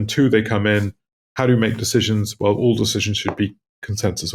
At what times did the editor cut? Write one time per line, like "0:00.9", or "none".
none